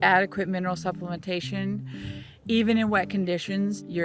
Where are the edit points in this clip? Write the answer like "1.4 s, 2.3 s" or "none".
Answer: none